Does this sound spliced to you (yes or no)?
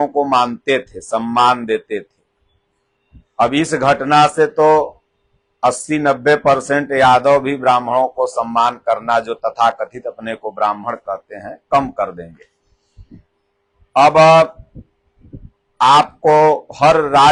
no